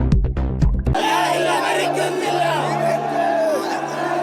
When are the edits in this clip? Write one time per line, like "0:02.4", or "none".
none